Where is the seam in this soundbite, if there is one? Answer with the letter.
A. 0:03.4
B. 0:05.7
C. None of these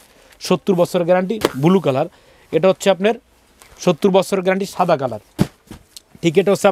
C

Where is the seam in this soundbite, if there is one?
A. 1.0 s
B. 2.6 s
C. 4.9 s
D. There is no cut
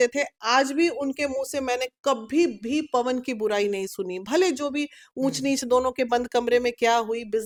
D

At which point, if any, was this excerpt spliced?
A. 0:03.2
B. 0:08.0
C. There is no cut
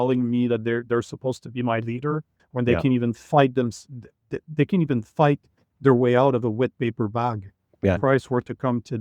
B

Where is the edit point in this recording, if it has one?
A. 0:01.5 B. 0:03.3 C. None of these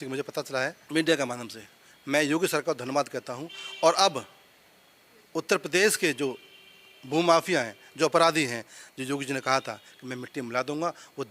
C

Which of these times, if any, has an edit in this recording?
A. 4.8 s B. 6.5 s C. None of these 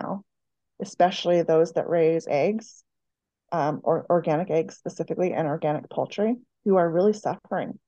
B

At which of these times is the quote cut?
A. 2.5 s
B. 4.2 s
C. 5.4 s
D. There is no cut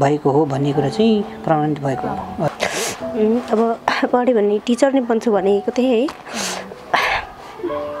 A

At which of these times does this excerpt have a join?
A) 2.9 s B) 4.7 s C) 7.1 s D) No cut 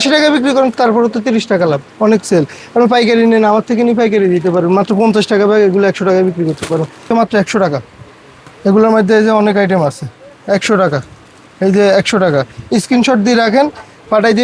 C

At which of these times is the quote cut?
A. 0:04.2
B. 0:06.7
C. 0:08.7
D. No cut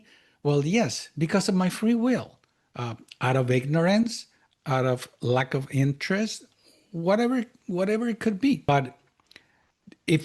C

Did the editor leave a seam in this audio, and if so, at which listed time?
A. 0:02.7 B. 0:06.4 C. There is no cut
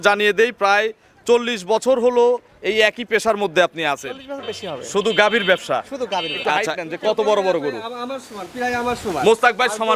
B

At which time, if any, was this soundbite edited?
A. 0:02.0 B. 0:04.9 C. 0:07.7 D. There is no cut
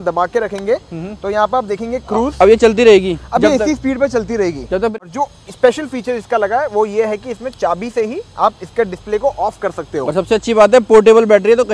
B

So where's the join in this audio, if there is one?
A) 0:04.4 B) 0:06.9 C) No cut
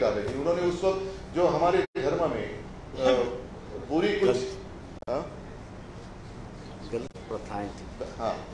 C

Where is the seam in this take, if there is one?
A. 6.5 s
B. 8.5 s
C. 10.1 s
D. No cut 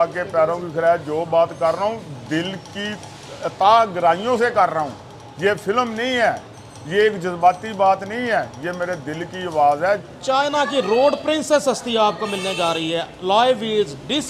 C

